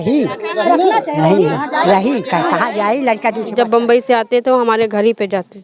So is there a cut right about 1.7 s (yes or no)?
no